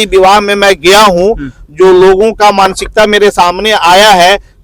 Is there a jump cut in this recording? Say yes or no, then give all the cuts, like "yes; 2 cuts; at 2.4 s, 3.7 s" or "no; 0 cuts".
no; 0 cuts